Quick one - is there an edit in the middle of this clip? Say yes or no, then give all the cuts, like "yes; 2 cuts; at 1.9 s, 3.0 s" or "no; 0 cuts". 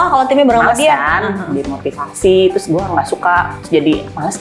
no; 0 cuts